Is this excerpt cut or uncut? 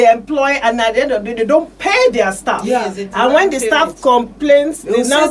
uncut